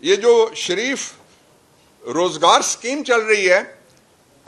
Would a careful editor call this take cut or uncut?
uncut